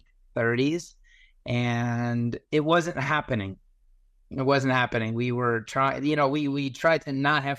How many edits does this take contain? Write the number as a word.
zero